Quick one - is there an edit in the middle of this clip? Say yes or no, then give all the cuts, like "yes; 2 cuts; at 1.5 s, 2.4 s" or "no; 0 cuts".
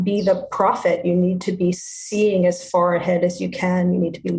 no; 0 cuts